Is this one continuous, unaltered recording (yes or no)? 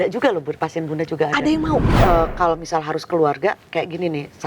no